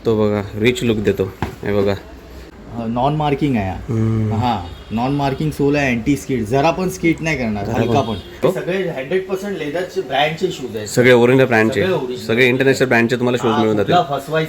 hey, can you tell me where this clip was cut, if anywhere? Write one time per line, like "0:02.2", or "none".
0:02.6
0:08.4